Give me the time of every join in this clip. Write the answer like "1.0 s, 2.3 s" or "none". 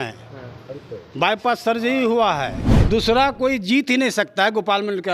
2.7 s